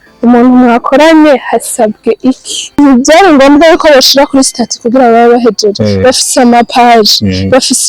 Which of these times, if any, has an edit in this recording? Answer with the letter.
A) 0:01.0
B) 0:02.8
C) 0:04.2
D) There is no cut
B